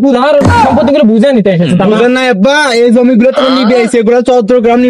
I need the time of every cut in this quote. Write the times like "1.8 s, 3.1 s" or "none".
none